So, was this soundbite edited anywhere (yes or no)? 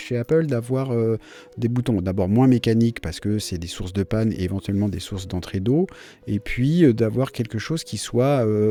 no